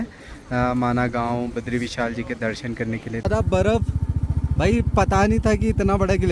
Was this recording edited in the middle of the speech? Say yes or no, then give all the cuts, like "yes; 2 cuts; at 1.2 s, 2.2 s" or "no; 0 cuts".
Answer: yes; 1 cut; at 3.2 s